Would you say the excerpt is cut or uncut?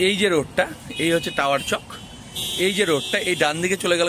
uncut